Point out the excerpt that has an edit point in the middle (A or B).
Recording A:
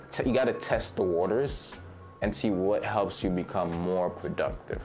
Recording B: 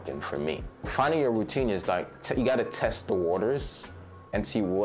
B